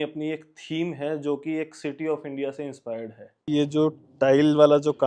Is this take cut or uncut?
cut